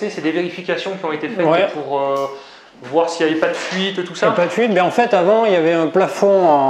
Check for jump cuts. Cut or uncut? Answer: uncut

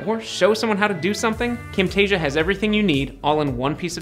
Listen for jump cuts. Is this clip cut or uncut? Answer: cut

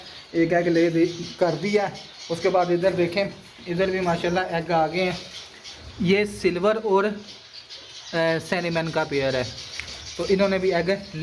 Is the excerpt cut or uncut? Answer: uncut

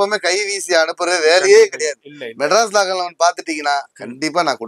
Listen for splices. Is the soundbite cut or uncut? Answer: uncut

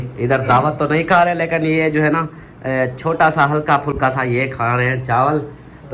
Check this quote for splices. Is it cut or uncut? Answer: uncut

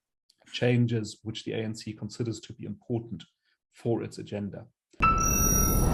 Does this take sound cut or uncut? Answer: cut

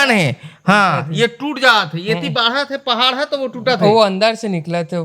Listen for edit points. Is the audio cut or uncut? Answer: uncut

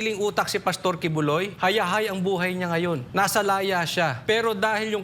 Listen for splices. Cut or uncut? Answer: cut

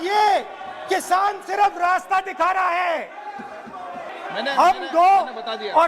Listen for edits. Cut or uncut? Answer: cut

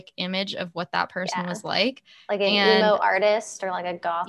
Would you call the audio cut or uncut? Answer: uncut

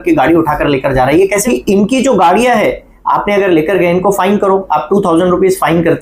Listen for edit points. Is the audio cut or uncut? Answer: cut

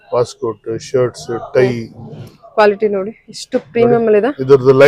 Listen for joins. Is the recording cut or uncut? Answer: uncut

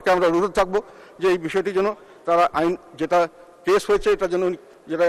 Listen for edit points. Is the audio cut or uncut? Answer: uncut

